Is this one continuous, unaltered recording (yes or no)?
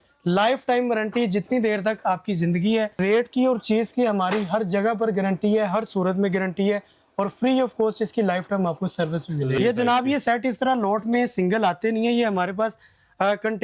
no